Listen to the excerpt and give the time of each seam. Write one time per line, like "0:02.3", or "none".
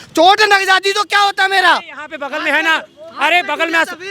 none